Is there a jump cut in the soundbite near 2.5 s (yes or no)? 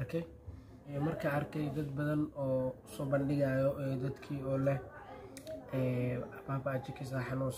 no